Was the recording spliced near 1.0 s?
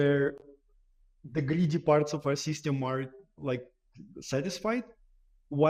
no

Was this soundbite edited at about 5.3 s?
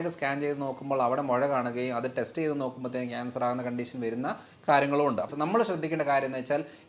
yes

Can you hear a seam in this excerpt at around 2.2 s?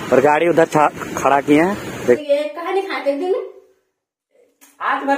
yes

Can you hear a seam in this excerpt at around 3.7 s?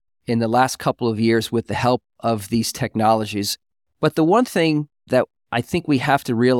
no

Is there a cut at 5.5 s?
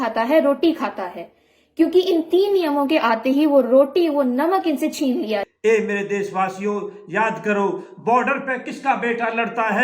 yes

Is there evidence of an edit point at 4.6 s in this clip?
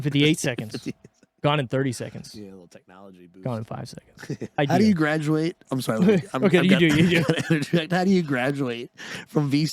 yes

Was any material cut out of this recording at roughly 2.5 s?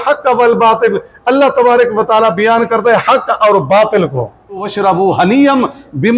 no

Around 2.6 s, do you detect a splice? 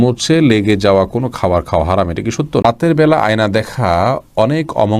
yes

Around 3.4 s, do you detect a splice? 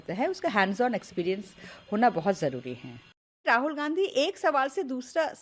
yes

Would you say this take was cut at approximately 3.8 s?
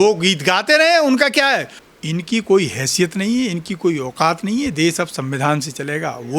no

